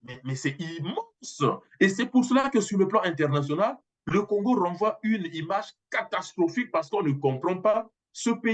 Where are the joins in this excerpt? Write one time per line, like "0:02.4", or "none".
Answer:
none